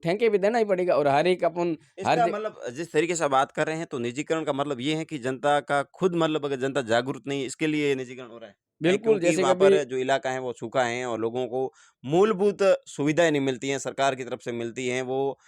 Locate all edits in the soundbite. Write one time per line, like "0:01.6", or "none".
0:09.8